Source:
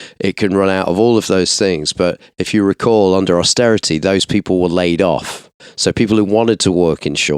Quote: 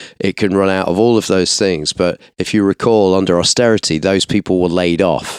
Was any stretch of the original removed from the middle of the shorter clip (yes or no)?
no